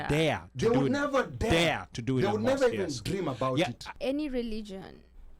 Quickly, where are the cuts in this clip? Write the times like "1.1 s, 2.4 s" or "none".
3.8 s